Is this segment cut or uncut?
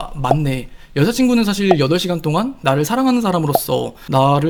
uncut